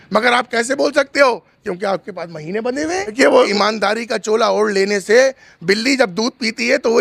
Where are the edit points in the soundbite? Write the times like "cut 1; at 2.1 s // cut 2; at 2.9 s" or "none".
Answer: cut 1; at 3.5 s